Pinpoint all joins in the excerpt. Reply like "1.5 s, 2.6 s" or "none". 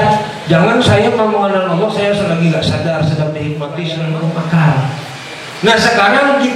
4.0 s